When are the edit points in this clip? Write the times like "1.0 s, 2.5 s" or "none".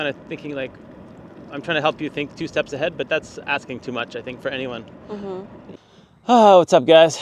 5.7 s